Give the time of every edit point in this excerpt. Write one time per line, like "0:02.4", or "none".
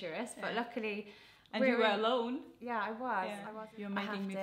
0:03.5

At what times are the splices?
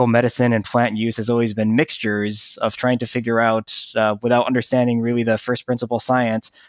none

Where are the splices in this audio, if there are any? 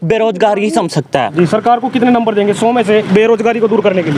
0:01.3
0:03.1

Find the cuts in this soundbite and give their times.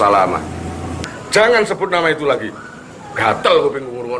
0:01.0

